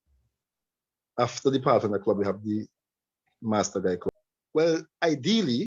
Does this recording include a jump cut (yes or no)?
yes